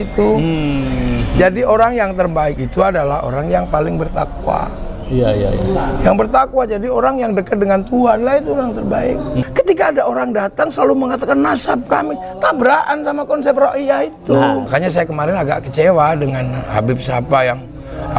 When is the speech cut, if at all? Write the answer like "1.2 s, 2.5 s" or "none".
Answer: 9.5 s, 14.7 s